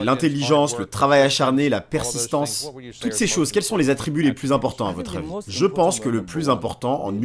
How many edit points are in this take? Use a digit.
0